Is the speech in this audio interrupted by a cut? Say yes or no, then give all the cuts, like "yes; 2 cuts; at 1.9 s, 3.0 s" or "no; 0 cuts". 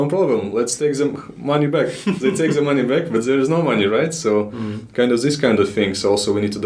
no; 0 cuts